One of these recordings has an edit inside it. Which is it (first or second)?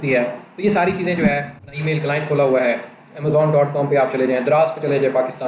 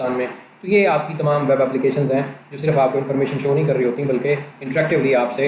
first